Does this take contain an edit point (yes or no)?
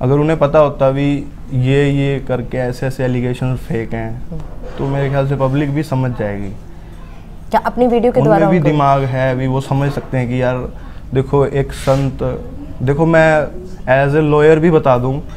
no